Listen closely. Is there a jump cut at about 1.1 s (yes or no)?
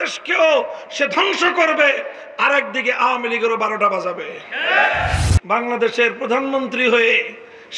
no